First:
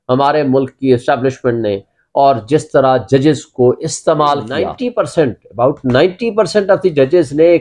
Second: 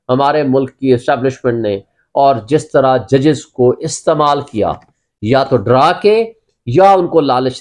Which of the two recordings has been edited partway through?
first; 1 cut; at 4.8 s

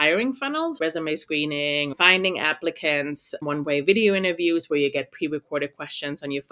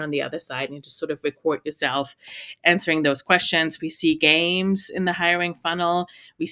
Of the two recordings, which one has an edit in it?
first; 3 cuts; at 0.8 s, 1.9 s, 3.4 s

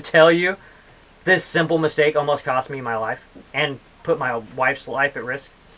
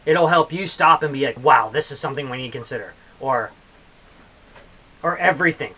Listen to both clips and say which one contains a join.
second; 1 cut; at 1.4 s

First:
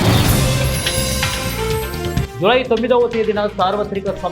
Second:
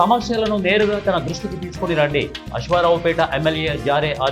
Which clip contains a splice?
first; 1 cut; at 2.3 s

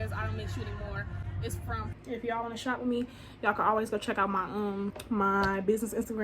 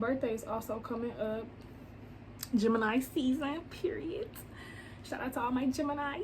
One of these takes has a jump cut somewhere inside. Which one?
first; 2 cuts; at 1.9 s, 5.0 s

